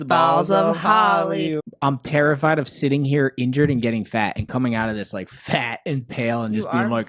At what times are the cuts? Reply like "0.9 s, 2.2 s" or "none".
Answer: 1.6 s